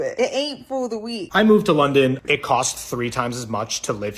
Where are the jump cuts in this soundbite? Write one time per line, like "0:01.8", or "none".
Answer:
0:01.2
0:02.2